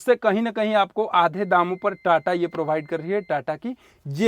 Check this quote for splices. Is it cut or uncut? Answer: uncut